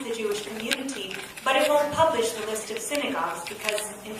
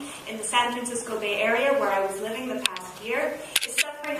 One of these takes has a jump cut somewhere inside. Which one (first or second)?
first